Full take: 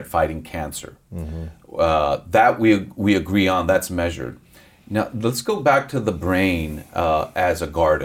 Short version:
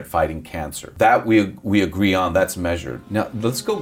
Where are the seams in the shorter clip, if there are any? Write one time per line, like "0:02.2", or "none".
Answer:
0:00.9
0:02.9